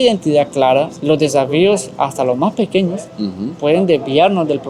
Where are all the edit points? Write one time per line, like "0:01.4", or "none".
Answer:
0:00.9